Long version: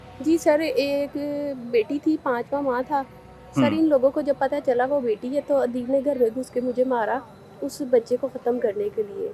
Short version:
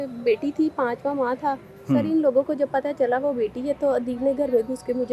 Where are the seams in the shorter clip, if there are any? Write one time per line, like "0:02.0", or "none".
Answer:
0:01.7